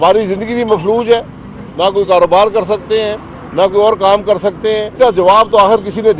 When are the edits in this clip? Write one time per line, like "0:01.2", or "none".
0:04.9